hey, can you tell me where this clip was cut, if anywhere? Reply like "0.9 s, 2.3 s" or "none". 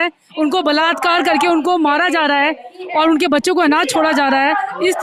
none